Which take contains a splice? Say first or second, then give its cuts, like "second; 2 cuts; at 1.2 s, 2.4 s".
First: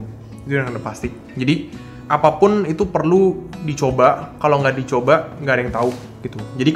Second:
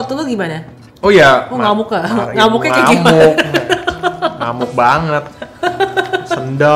first; 1 cut; at 1.9 s